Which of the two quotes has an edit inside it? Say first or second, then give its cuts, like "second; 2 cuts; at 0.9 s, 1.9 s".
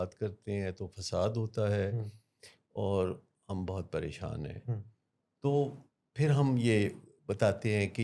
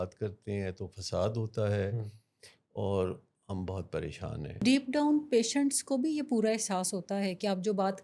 second; 1 cut; at 4.6 s